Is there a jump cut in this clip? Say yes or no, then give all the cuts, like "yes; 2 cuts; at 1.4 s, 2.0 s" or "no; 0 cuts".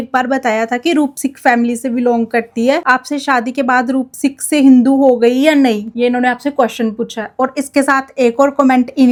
no; 0 cuts